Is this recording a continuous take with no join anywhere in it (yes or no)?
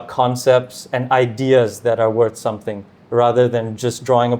yes